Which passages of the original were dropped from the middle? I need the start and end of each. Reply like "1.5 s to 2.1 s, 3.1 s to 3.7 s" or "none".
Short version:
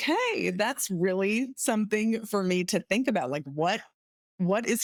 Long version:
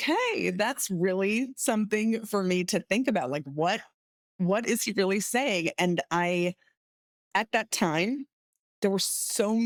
none